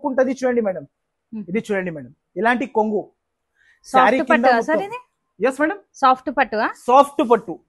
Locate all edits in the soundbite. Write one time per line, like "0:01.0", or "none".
none